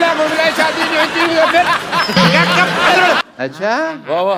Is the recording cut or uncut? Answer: cut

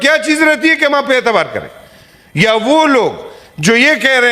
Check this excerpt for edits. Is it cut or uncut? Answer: uncut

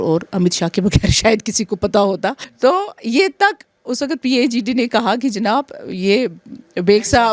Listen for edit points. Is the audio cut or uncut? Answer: cut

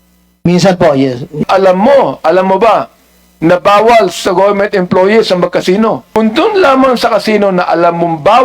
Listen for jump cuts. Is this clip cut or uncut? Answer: cut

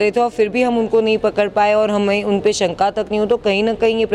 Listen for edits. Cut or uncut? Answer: uncut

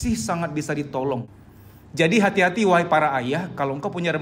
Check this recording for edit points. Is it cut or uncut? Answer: cut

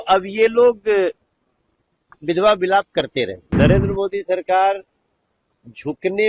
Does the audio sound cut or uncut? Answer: cut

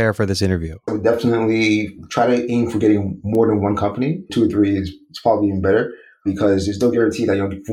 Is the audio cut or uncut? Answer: cut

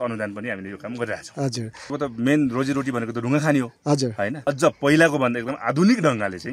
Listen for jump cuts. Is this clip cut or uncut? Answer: cut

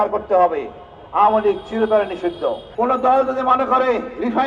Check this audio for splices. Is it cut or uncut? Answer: cut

